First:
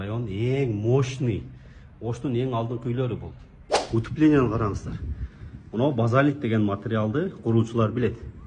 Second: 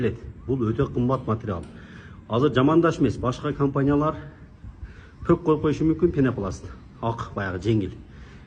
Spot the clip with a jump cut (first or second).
first